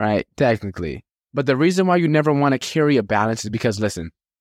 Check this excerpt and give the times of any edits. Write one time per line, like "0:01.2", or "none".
0:01.2